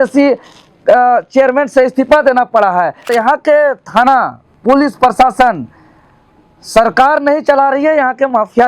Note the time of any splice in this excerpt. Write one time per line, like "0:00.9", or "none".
0:03.1